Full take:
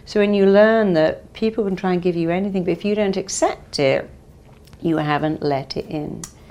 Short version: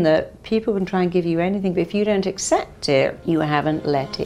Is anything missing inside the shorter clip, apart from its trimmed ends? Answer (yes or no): yes